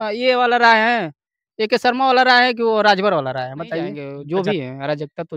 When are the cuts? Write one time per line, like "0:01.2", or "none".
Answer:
0:04.1